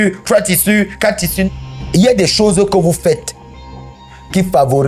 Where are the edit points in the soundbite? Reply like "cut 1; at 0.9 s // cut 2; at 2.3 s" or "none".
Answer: cut 1; at 1.5 s